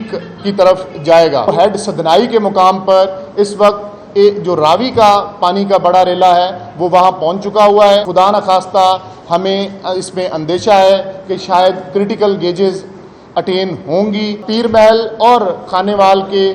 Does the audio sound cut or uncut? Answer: cut